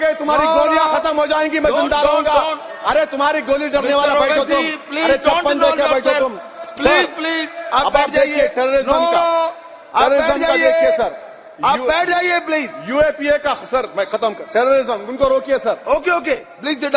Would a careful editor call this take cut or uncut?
uncut